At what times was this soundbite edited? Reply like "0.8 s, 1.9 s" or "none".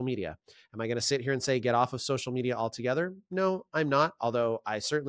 none